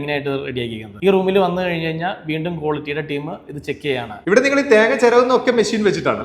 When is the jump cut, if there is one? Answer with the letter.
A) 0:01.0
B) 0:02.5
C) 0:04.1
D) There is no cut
C